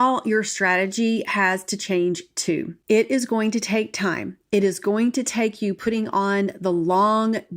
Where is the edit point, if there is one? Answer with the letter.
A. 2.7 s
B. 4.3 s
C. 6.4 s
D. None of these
A